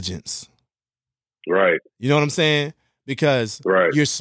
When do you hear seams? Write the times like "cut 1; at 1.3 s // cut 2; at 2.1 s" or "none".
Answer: none